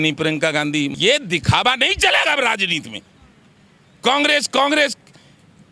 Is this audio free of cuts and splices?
no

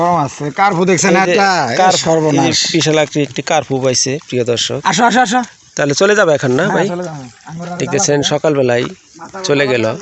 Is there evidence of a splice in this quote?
no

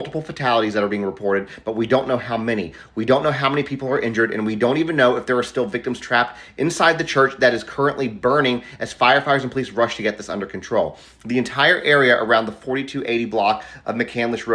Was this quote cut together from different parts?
no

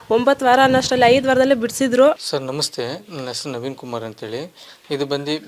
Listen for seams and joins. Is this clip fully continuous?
no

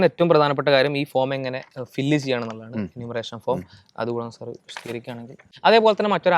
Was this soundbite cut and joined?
yes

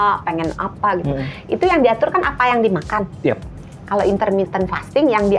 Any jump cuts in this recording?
no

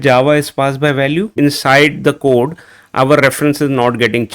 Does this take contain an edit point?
yes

